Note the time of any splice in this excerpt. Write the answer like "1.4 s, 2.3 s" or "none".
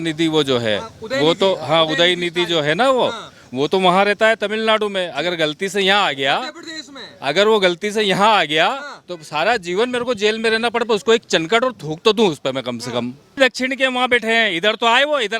13.4 s